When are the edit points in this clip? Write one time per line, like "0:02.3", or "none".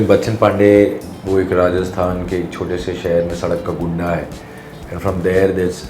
0:01.1